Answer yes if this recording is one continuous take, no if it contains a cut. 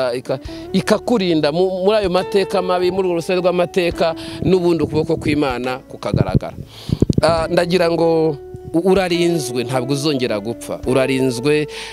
no